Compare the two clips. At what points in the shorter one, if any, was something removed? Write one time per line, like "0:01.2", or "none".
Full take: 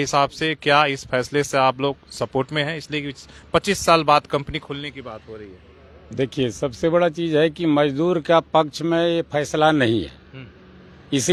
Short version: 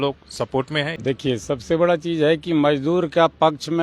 0:00.9